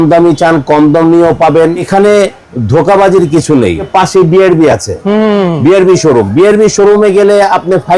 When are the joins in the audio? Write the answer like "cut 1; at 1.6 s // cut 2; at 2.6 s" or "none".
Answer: cut 1; at 1.9 s // cut 2; at 3.9 s